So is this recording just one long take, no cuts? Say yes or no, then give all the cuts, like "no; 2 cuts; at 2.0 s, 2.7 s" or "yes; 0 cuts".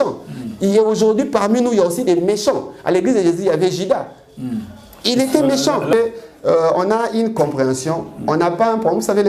no; 1 cut; at 5.9 s